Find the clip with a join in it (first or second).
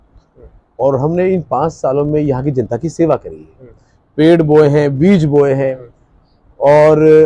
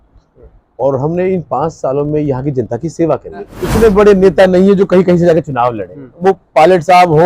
second